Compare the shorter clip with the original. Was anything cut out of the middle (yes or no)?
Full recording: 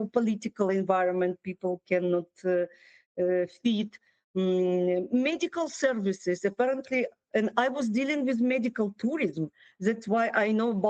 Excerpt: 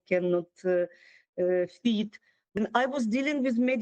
yes